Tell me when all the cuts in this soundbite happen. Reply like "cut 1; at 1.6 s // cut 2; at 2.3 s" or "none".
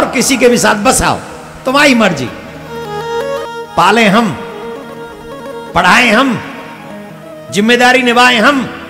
cut 1; at 3.4 s

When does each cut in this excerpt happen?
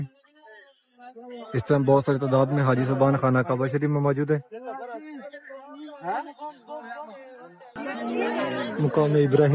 cut 1; at 7.8 s

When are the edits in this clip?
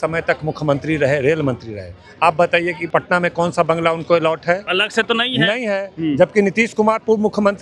cut 1; at 2.8 s // cut 2; at 4.7 s

